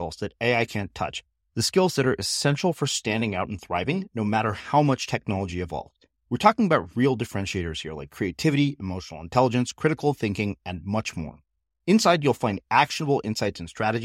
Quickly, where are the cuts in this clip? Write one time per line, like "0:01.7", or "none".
none